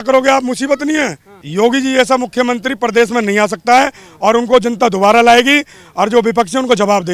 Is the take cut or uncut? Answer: uncut